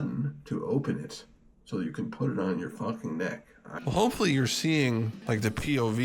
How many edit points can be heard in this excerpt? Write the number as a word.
one